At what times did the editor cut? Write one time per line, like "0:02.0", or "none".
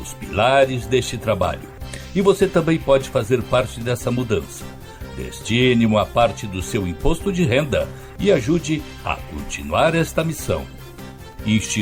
none